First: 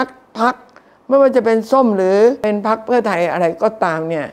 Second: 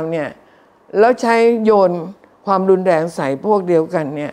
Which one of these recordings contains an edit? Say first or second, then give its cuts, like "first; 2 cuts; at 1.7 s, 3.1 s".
first; 1 cut; at 2.4 s